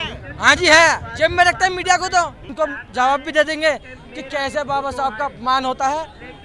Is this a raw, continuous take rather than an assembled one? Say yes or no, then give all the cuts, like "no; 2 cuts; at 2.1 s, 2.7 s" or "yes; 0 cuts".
no; 1 cut; at 2.5 s